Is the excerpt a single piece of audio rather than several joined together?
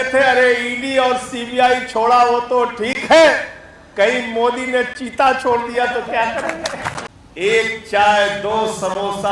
no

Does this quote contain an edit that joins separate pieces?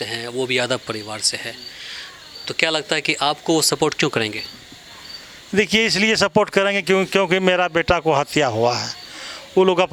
no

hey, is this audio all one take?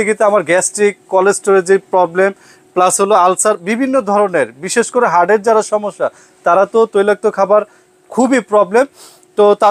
yes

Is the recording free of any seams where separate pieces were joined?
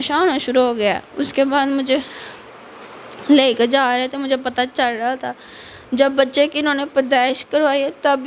yes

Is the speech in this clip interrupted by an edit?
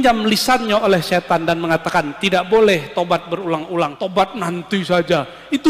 yes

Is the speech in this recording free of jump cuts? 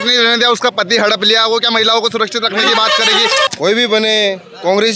no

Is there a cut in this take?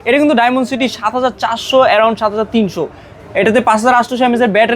no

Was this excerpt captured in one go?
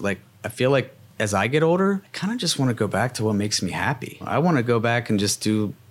no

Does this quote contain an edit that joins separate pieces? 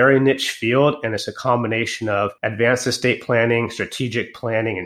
yes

